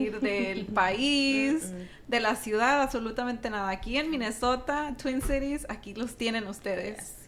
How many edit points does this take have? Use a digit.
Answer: 0